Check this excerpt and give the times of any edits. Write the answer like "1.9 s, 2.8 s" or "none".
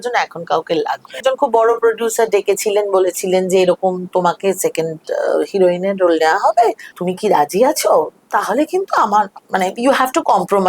1.2 s, 6.9 s